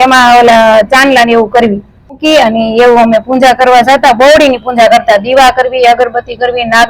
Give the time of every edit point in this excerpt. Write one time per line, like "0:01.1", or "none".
0:02.2